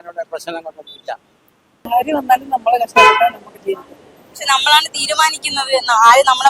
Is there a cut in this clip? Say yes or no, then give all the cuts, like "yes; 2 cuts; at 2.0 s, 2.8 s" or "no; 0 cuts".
yes; 1 cut; at 1.9 s